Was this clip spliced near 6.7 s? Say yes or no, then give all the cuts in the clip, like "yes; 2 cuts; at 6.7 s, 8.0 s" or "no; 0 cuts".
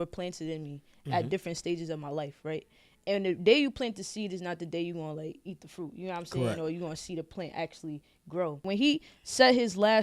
no; 1 cut; at 8.6 s